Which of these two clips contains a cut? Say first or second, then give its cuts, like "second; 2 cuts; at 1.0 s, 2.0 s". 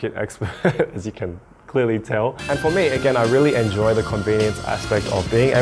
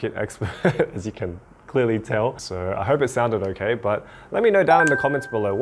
first; 1 cut; at 2.4 s